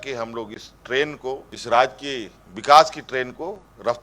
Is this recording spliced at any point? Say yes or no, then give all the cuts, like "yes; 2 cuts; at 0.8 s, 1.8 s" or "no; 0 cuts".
yes; 1 cut; at 1.5 s